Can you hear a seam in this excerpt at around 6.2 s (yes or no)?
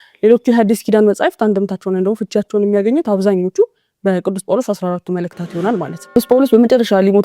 yes